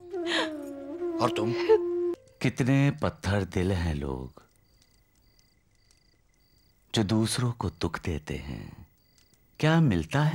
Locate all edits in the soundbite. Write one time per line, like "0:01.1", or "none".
0:02.2